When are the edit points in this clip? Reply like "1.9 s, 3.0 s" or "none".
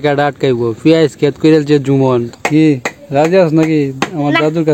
2.3 s